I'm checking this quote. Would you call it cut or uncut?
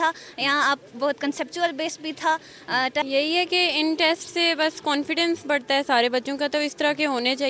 cut